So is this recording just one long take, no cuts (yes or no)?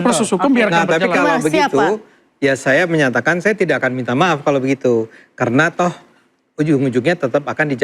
yes